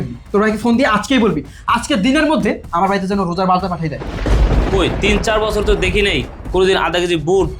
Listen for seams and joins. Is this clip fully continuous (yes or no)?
no